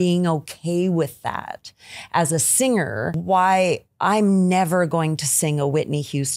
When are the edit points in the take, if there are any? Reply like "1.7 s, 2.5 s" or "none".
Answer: 3.2 s